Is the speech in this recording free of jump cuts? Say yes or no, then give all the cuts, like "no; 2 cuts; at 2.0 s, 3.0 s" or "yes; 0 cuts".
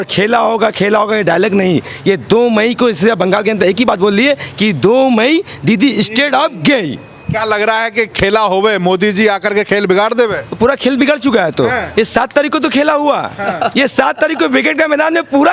yes; 0 cuts